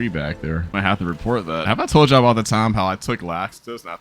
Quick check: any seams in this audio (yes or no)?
yes